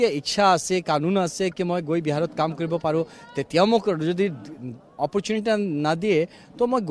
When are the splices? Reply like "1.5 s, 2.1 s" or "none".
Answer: none